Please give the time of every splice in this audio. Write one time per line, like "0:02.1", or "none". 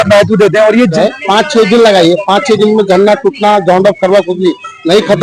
0:01.0

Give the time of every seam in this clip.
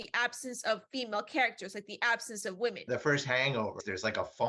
0:02.8

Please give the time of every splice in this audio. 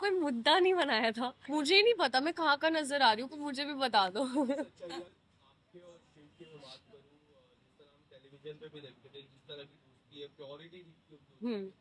0:01.4
0:05.1

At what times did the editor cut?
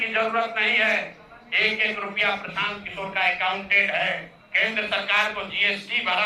none

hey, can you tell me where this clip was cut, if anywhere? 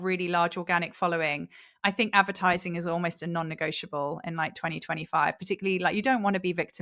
none

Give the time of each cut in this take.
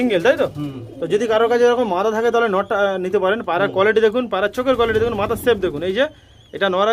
none

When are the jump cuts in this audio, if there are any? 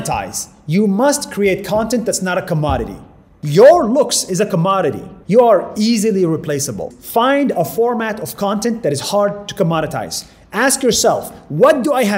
0:05.1
0:06.9

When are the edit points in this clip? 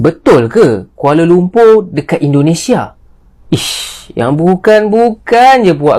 none

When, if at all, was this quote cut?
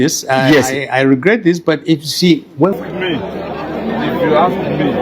0:02.7

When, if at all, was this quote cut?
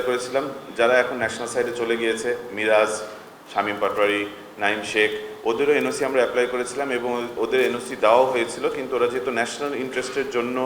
none

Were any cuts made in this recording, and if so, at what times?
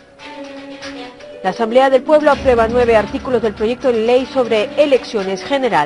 0:01.4

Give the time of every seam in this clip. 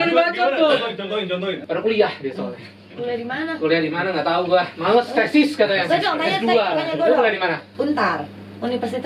0:01.6

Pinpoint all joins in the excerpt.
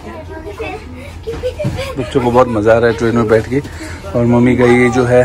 none

